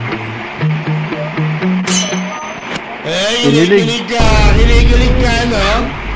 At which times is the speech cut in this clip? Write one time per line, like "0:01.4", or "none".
none

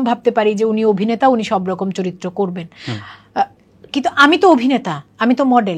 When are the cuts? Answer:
none

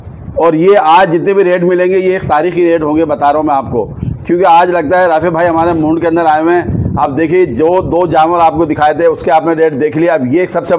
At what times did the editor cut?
none

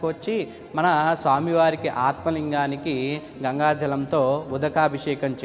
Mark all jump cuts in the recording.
none

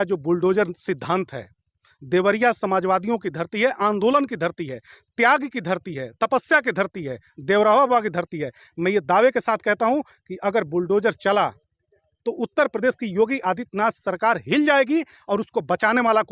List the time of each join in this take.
none

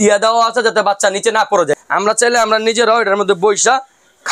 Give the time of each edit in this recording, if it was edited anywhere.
0:01.8

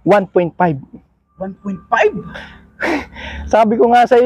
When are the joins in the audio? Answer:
none

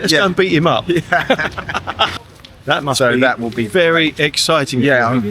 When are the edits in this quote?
0:02.1

